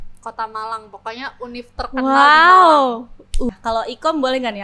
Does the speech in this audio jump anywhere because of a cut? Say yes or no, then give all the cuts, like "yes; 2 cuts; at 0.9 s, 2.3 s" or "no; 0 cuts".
yes; 1 cut; at 3.4 s